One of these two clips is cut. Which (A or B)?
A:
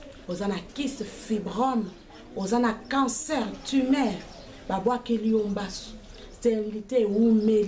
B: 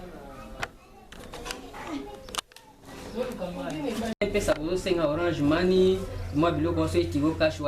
B